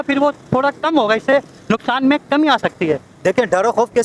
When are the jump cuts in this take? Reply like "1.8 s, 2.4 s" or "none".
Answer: none